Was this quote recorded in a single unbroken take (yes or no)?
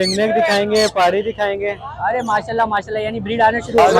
yes